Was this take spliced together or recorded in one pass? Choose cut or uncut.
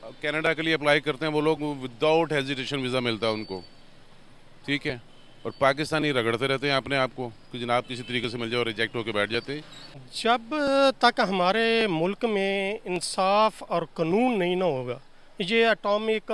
cut